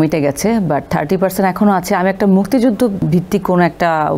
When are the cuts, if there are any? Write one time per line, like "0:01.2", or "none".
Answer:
0:03.1